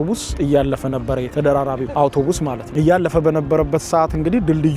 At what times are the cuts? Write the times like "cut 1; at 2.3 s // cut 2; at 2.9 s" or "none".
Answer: none